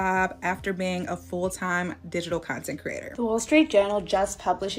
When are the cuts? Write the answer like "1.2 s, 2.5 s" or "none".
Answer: 3.0 s